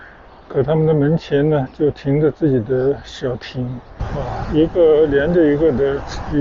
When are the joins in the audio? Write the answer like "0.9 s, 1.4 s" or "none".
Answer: 4.0 s